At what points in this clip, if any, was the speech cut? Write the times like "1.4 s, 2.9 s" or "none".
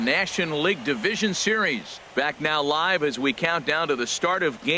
2.0 s